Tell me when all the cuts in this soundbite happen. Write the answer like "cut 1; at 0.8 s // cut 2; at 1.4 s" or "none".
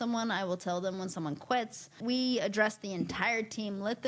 cut 1; at 1.9 s